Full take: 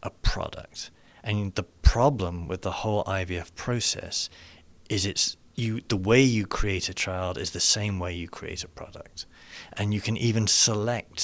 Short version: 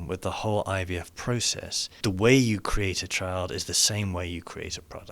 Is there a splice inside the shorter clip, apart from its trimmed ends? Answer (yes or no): yes